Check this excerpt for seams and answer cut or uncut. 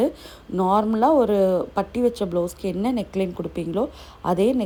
uncut